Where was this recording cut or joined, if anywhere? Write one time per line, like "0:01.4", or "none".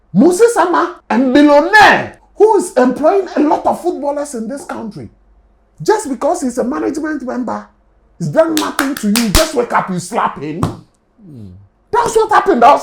0:01.0
0:02.2